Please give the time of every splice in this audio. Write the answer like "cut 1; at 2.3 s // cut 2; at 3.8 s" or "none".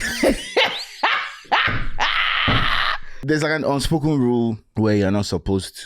cut 1; at 3.1 s // cut 2; at 4.6 s